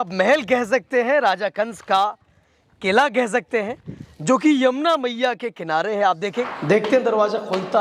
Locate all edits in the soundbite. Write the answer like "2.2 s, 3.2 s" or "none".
6.3 s